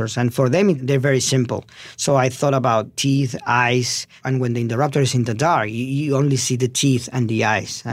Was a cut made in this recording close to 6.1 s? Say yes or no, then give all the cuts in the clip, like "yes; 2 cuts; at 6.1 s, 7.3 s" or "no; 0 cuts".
no; 3 cuts; at 0.8 s, 2.9 s, 4.2 s